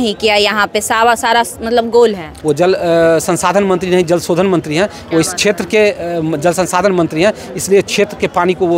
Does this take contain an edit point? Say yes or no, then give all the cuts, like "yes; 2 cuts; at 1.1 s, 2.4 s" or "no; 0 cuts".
yes; 1 cut; at 2.3 s